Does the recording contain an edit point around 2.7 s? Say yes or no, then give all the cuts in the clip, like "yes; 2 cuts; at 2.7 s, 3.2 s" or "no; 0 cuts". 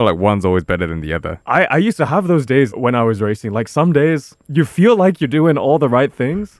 yes; 2 cuts; at 1.3 s, 2.7 s